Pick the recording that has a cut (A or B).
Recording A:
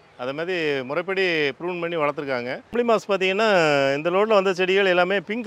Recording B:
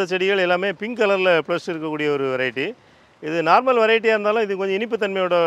A